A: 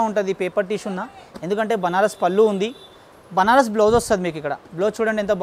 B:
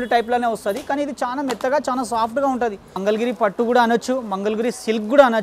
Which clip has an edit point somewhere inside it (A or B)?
B